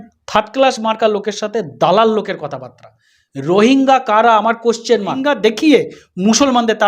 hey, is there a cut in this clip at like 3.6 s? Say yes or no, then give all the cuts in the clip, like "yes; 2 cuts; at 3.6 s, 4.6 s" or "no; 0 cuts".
no; 1 cut; at 5.3 s